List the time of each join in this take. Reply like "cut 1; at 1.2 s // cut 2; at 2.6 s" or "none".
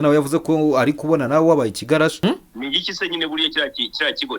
cut 1; at 2.2 s